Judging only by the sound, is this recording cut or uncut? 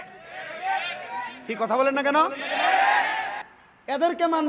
uncut